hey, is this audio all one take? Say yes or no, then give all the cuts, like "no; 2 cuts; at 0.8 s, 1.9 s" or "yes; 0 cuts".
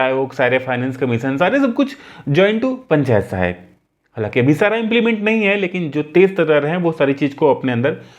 yes; 0 cuts